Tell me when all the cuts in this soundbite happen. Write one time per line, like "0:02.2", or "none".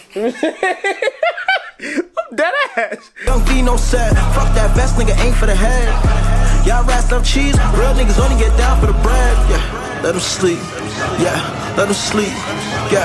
0:03.1